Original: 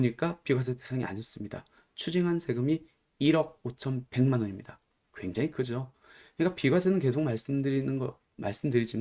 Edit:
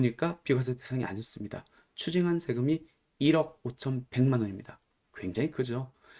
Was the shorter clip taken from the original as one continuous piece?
yes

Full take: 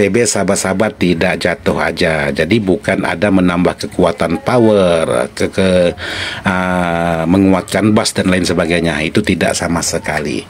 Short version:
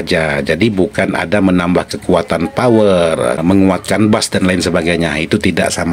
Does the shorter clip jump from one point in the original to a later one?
yes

